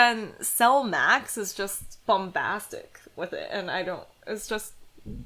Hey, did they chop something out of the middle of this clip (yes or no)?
yes